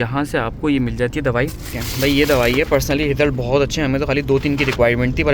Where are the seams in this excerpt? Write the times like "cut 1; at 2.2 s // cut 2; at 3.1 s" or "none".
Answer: cut 1; at 1.8 s